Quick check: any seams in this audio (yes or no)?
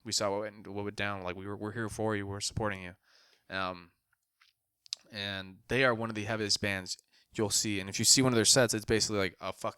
no